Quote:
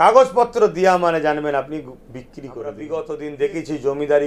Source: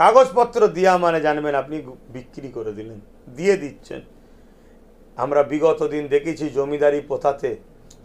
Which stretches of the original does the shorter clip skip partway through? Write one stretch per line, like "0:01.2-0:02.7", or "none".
0:02.8-0:05.5